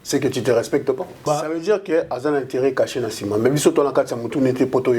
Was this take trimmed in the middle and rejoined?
yes; 1 cut; at 1.2 s

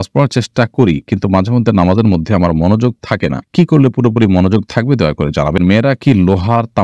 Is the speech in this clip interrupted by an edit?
yes; 1 cut; at 5.6 s

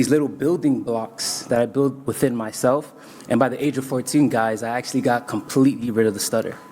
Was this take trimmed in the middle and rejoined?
no; 0 cuts

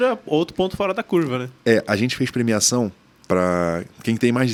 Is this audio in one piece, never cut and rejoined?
yes; 0 cuts

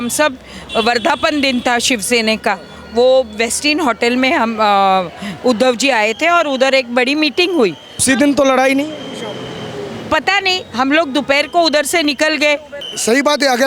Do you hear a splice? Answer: yes; 2 cuts; at 7.9 s, 12.7 s

